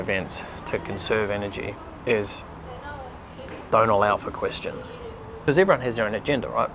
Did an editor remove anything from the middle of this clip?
yes; 1 cut; at 5.3 s

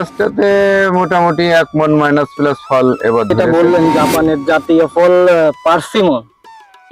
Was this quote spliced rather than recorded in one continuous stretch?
yes; 1 cut; at 3.3 s

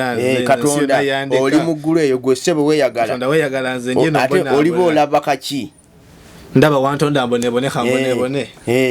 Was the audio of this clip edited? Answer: no; 0 cuts

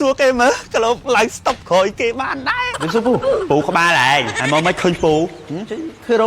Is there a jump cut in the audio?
yes; 3 cuts; at 1.0 s, 2.8 s, 4.3 s

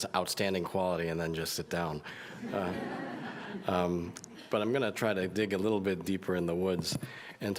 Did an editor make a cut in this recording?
yes; 1 cut; at 4.3 s

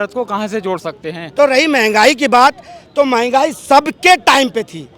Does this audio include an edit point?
yes; 1 cut; at 1.2 s

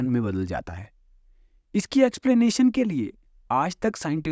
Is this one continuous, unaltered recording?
yes; 0 cuts

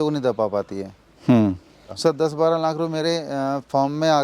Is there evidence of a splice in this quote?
yes; 1 cut; at 1.9 s

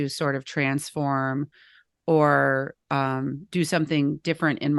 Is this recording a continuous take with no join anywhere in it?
yes; 0 cuts

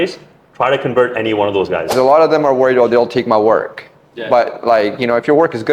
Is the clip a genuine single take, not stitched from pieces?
no; 1 cut; at 1.9 s

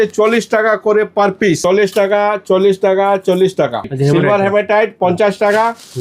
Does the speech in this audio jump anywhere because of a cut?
yes; 2 cuts; at 1.6 s, 3.9 s

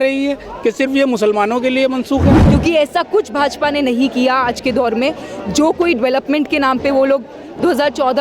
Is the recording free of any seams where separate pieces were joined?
no; 1 cut; at 2.4 s

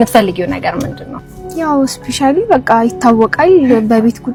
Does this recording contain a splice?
no; 0 cuts

